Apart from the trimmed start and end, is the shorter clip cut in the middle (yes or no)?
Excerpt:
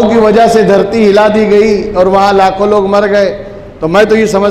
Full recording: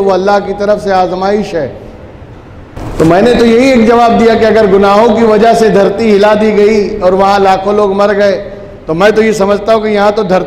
no